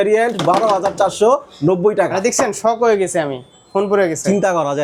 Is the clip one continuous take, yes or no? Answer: yes